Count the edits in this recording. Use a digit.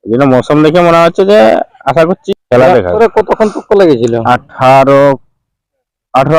2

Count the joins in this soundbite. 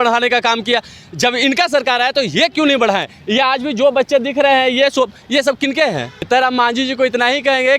1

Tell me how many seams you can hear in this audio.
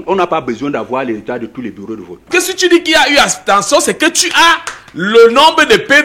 1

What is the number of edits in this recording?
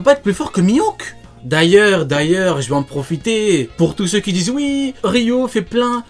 3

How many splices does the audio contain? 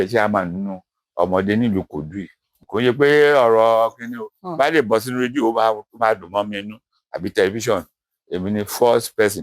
1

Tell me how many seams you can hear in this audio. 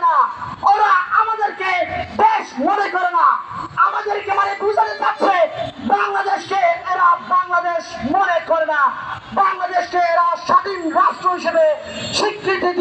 0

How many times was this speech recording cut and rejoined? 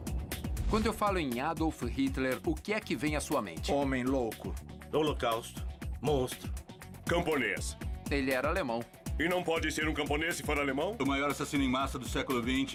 0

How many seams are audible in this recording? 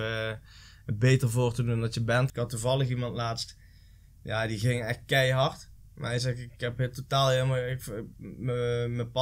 1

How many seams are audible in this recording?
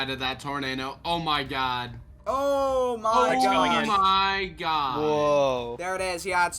1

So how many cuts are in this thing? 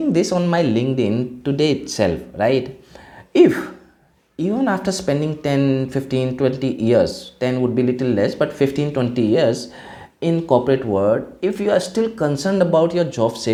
0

